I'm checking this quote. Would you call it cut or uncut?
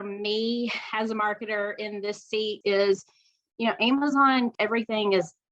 cut